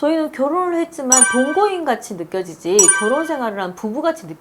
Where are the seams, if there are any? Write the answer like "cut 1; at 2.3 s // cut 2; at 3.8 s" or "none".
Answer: none